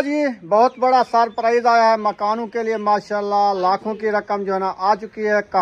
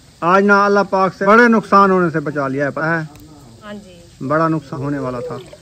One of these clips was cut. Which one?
second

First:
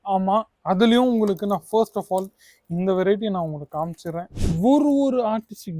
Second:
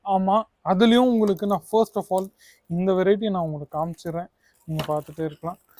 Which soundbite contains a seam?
first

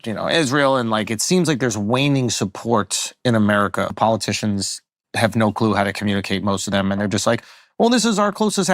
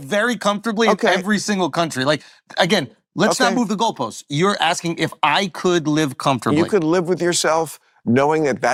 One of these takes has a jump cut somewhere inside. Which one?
first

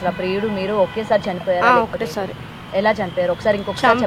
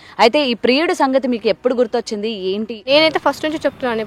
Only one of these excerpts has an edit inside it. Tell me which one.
second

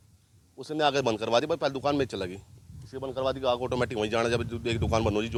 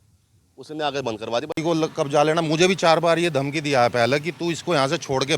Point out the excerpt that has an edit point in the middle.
second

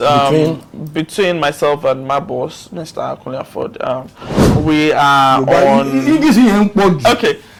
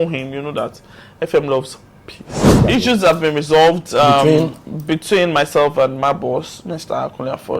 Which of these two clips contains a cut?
second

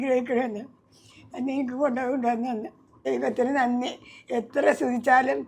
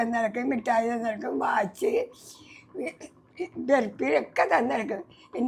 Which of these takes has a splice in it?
first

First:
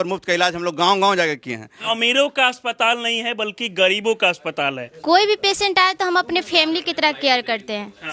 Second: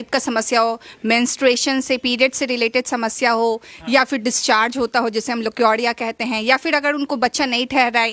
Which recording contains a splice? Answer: first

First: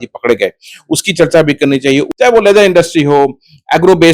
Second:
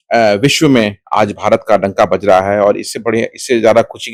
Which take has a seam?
first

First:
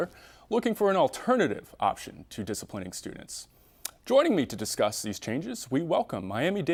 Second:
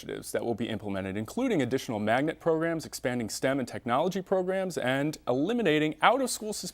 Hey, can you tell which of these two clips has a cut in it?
second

